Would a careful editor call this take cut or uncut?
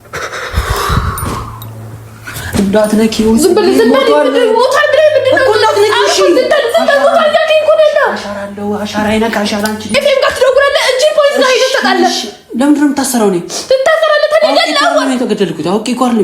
cut